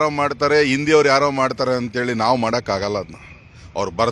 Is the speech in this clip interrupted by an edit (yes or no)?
no